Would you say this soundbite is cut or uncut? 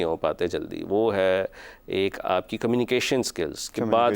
uncut